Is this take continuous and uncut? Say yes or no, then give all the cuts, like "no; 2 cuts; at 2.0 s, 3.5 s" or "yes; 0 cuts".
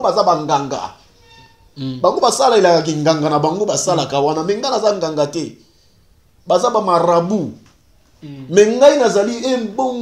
yes; 0 cuts